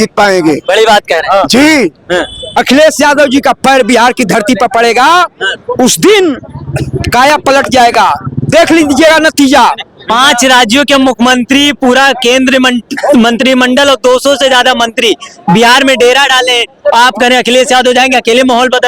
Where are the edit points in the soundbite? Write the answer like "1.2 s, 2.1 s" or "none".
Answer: 2.4 s